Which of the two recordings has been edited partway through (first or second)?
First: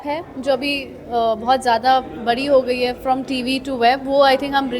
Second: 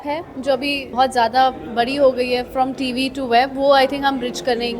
second